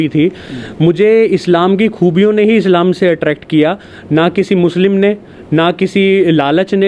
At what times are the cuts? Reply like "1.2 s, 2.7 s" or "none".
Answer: none